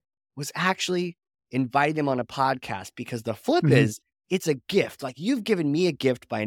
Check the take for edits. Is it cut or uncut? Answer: uncut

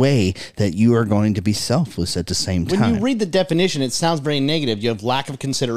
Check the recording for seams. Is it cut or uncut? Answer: uncut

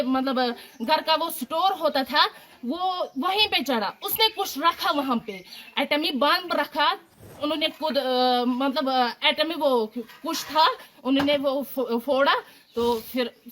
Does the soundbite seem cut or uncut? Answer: cut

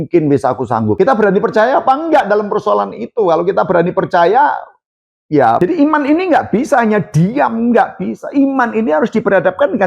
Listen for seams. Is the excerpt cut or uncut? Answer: cut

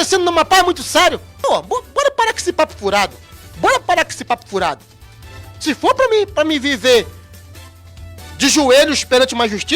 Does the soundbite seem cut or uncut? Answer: cut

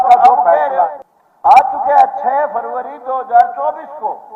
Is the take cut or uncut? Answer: cut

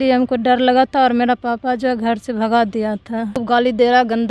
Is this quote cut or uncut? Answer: cut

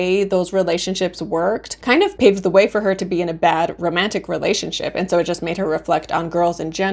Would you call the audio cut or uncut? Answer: uncut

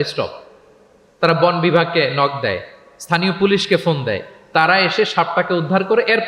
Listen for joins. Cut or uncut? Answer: uncut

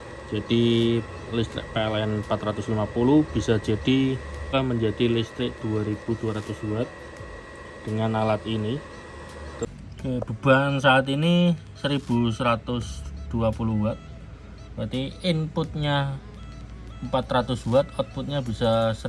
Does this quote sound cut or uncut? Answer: cut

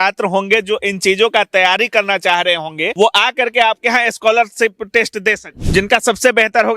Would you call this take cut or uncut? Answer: cut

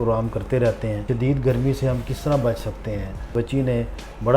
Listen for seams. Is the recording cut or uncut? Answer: cut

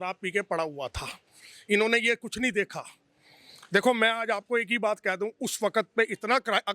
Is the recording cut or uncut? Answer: uncut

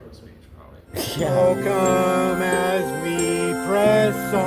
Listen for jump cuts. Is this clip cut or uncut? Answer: cut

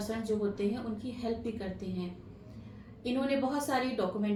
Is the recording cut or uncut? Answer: uncut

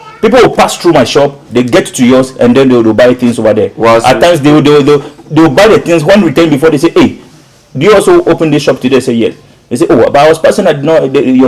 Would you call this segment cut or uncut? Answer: uncut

